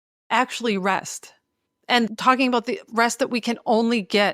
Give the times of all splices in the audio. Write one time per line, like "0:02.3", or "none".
0:02.1